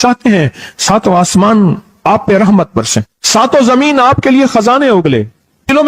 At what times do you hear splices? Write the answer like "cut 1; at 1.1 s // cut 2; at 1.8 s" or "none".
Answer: cut 1; at 3.2 s

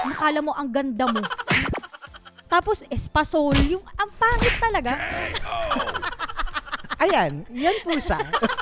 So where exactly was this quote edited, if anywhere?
none

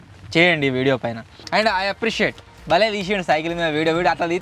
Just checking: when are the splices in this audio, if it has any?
cut 1; at 1.4 s

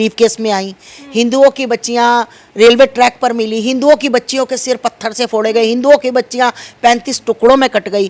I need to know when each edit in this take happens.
none

